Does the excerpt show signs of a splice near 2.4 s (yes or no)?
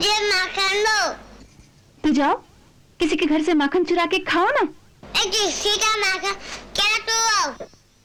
no